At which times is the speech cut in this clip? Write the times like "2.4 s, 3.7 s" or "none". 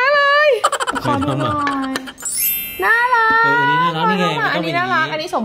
0.9 s